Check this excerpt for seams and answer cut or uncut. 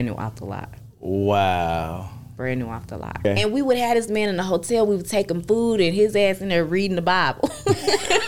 cut